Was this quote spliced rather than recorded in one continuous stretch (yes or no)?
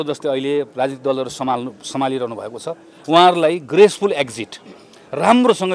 no